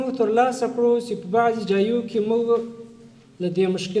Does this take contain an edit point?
no; 0 cuts

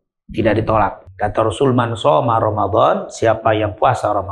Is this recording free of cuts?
no; 1 cut; at 1.0 s

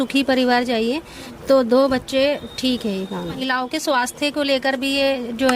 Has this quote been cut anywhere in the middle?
yes; 1 cut; at 3.4 s

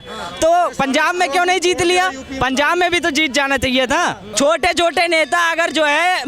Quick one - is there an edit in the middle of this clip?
yes; 1 cut; at 4.2 s

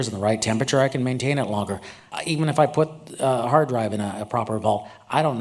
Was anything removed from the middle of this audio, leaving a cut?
yes; 1 cut; at 2.1 s

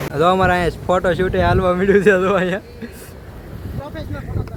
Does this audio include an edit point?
no; 0 cuts

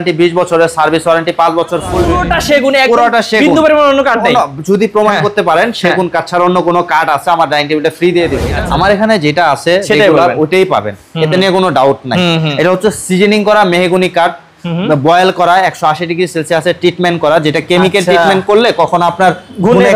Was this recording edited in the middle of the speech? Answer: yes; 2 cuts; at 2.1 s, 8.5 s

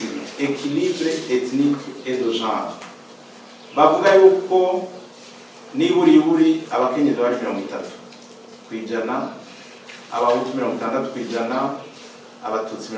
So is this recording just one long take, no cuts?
yes; 0 cuts

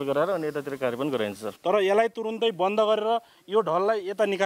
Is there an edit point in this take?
yes; 1 cut; at 1.5 s

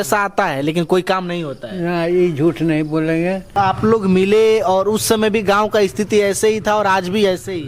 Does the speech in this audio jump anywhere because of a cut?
yes; 1 cut; at 3.6 s

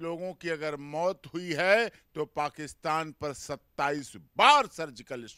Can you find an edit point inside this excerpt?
no; 0 cuts

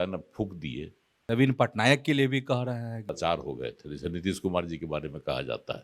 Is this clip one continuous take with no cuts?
no; 2 cuts; at 1.2 s, 3.0 s

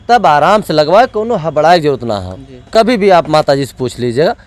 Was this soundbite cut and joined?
no; 0 cuts

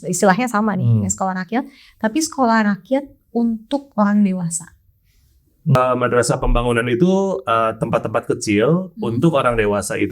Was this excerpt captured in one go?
no; 1 cut; at 5.8 s

